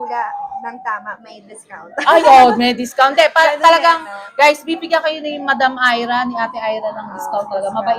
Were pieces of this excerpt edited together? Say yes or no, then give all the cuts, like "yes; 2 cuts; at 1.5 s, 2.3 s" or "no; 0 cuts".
no; 0 cuts